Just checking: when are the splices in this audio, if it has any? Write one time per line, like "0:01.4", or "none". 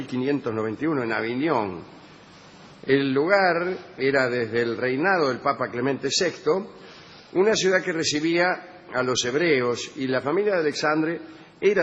0:09.0